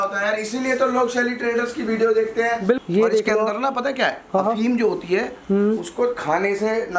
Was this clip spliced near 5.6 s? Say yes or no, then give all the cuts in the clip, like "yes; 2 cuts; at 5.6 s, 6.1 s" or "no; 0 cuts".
no; 1 cut; at 2.8 s